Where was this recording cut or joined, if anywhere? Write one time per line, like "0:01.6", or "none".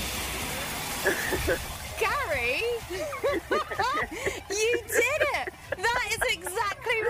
none